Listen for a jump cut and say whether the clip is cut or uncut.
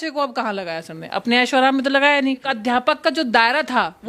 cut